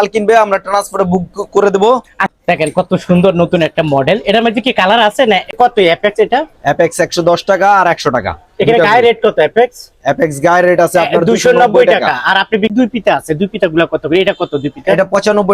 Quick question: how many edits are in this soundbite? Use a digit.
3